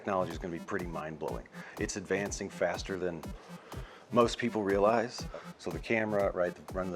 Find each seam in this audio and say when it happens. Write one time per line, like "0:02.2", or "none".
0:05.2